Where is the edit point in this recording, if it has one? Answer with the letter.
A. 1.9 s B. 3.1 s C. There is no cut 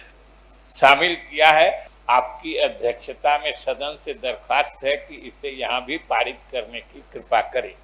A